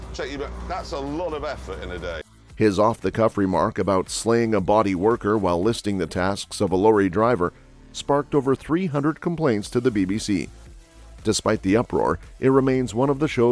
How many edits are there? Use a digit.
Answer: 0